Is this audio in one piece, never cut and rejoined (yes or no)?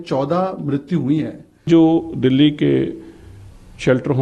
no